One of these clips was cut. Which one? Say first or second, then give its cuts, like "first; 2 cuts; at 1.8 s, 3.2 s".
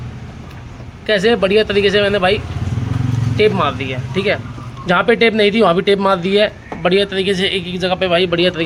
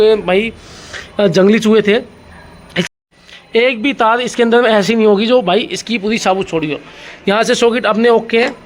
second; 1 cut; at 2.9 s